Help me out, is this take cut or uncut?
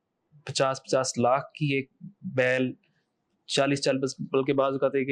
uncut